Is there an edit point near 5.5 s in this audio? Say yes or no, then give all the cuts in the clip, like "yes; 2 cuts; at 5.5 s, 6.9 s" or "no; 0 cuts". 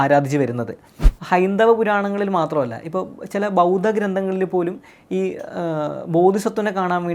no; 1 cut; at 1.0 s